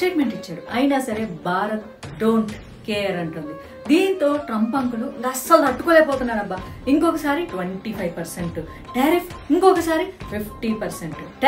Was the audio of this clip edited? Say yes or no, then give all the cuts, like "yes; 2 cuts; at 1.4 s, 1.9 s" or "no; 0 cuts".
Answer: no; 0 cuts